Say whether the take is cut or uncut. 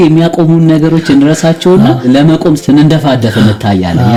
uncut